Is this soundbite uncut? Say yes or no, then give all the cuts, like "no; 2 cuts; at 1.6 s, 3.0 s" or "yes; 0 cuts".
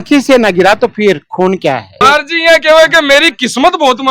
no; 1 cut; at 1.9 s